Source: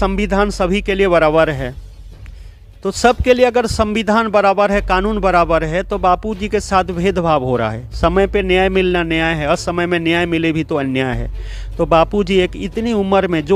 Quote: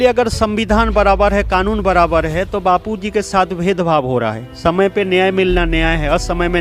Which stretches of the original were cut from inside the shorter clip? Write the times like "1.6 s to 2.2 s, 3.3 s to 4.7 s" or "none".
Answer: none

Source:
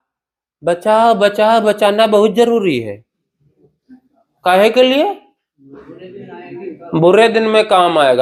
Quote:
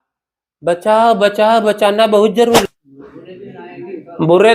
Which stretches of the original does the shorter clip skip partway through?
2.7 s to 5.4 s

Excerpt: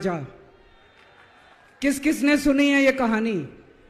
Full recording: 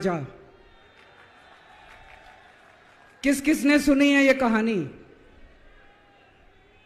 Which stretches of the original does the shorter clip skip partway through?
1.6 s to 3.0 s

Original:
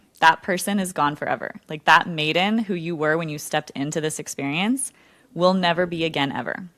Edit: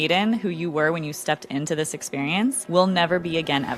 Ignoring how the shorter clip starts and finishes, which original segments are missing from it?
4.9 s to 5.3 s

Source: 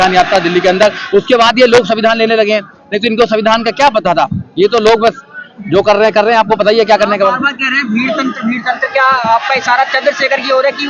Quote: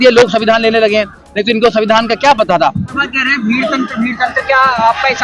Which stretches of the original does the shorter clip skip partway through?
4.5 s to 7.4 s

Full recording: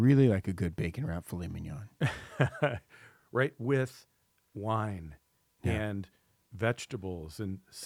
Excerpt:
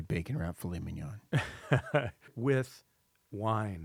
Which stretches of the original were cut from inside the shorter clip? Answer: 3.0 s to 3.6 s

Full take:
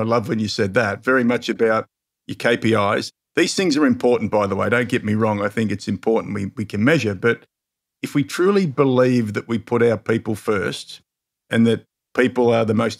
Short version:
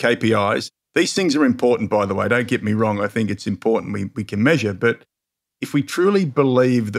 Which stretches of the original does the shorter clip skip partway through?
none

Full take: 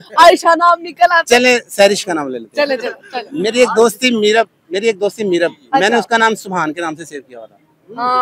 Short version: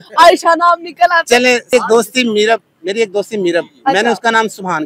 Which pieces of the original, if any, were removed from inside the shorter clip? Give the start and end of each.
1.7 s to 3.5 s

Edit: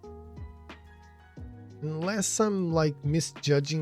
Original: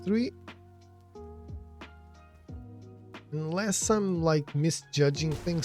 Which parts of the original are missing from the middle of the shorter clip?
2.9 s to 3.3 s

